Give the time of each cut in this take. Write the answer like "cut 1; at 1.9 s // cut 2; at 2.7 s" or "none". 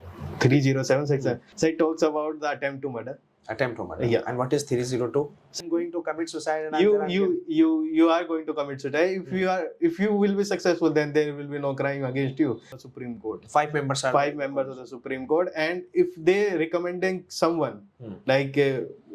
cut 1; at 1.5 s // cut 2; at 5.6 s // cut 3; at 12.8 s